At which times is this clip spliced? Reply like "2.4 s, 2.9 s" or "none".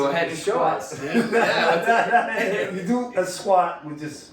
2.6 s